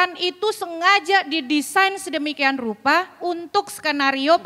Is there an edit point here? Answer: no; 0 cuts

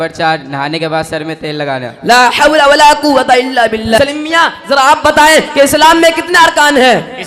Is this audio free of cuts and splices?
no; 1 cut; at 4.0 s

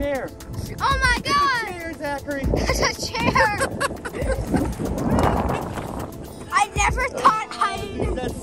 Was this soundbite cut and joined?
no; 0 cuts

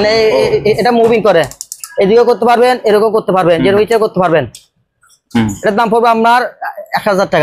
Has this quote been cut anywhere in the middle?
no; 0 cuts

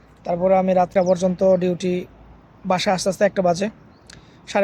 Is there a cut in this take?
yes; 1 cut; at 0.9 s

